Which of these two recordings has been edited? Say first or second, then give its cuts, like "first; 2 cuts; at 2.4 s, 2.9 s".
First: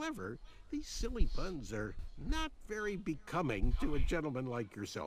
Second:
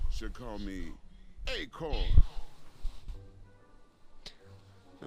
first; 1 cut; at 1.1 s